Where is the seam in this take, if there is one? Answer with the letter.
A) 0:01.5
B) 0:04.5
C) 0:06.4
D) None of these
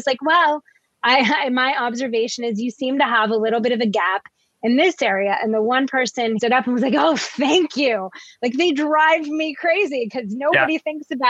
C